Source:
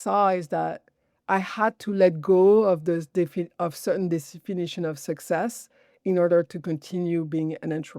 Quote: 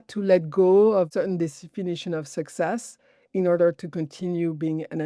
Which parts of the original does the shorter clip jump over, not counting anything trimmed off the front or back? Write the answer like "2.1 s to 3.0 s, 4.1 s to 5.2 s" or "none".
2.8 s to 3.8 s